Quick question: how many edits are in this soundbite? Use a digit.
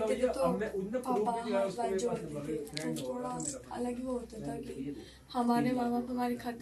0